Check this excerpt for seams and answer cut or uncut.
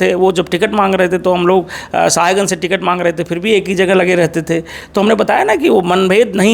uncut